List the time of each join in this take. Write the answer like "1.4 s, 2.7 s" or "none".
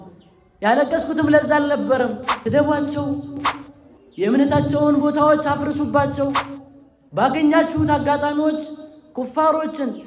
2.3 s